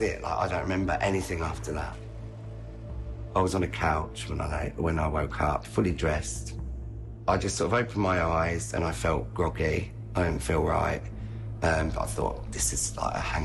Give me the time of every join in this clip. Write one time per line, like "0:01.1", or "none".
none